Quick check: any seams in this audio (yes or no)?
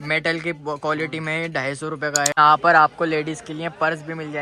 yes